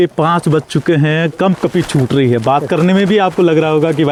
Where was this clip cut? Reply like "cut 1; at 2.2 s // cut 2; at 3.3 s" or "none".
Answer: none